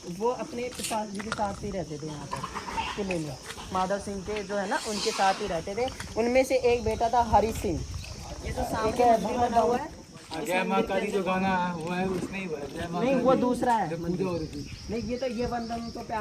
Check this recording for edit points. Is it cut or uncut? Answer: cut